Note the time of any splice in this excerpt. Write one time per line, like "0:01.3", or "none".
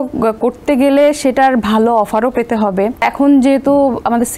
0:03.1